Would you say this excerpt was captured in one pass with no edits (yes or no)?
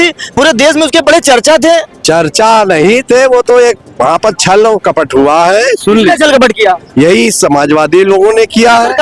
yes